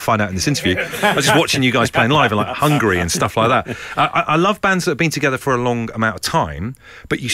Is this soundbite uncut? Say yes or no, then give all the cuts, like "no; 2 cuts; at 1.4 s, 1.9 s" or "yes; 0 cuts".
yes; 0 cuts